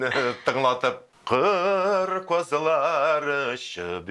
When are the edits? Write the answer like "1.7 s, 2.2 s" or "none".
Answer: 1.1 s